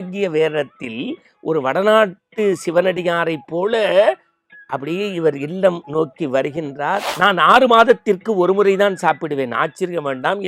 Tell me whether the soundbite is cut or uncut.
cut